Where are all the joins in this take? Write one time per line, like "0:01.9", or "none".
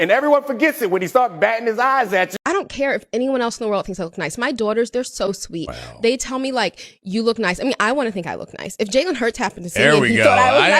0:02.4